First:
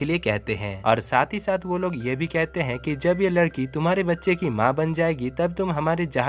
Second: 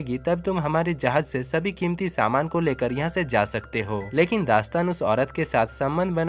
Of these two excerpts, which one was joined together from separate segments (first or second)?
second